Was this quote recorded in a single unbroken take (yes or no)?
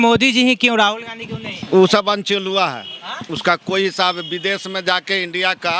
no